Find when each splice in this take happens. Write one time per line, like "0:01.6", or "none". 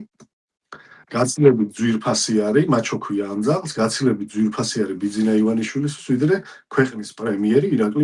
none